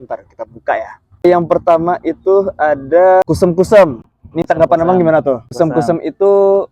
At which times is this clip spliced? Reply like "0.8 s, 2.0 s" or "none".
1.2 s, 3.2 s, 5.5 s

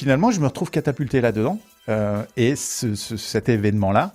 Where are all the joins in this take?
none

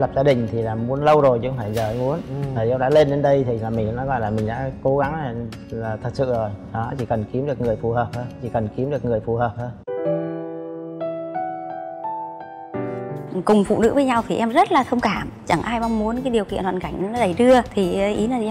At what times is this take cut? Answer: 13.3 s

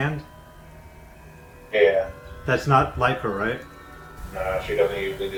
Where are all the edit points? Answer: none

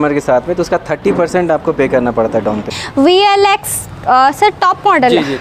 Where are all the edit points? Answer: 2.7 s

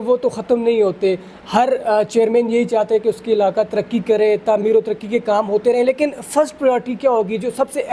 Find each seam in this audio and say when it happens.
none

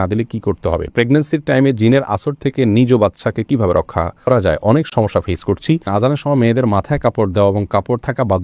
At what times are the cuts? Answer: 0.9 s, 4.3 s, 5.9 s

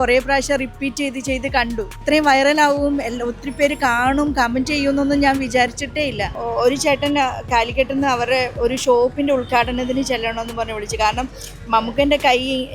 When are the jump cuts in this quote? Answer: 2.0 s, 6.4 s

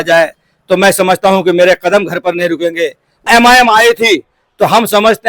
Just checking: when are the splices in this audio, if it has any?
3.3 s

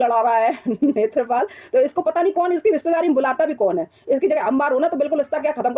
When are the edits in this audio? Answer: none

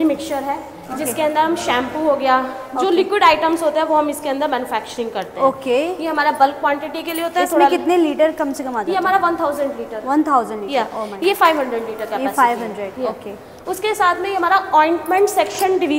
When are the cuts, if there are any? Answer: none

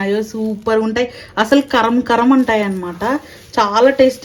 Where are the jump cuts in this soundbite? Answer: none

